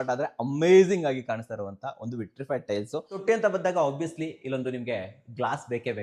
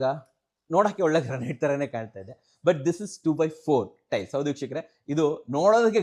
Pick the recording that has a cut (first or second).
first